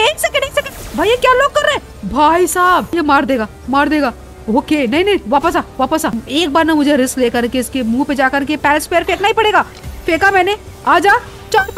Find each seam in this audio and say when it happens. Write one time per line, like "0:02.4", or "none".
0:02.9
0:06.2